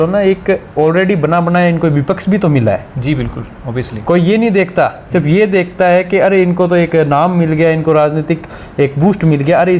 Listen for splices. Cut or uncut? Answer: uncut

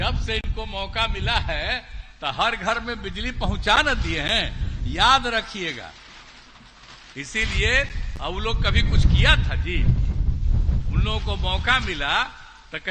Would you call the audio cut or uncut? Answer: uncut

